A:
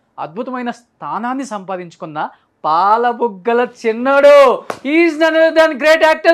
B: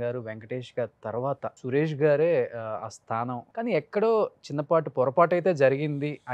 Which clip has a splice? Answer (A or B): B